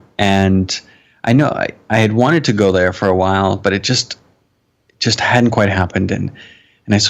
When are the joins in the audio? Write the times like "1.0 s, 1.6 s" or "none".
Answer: none